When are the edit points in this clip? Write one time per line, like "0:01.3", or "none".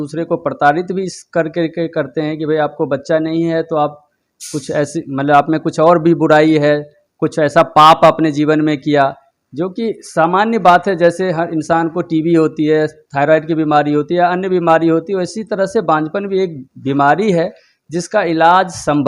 none